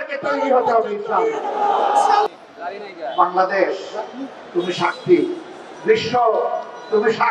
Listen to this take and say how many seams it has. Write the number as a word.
one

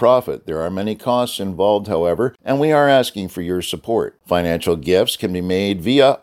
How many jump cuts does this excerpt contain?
one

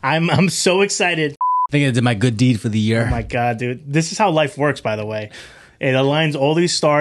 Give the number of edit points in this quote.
one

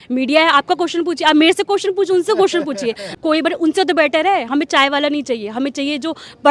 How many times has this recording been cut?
one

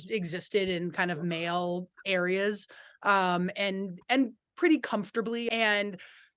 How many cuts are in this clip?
one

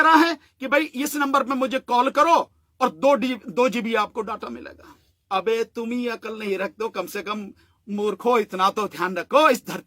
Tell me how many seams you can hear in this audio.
one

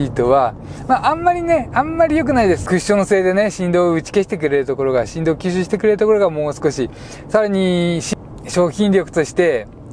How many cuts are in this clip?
two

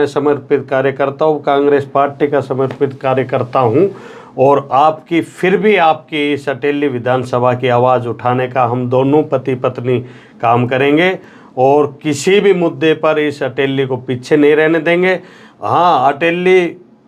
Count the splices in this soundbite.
zero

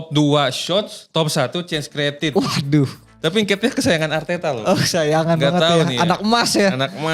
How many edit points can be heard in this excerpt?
one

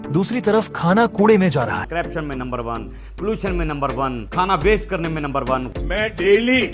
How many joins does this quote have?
three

